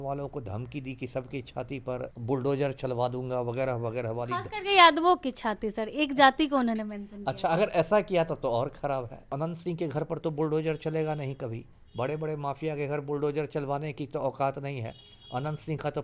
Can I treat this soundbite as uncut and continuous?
no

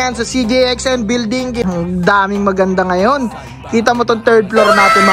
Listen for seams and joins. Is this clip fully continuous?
no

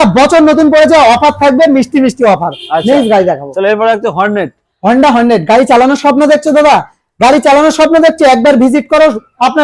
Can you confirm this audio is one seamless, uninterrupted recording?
yes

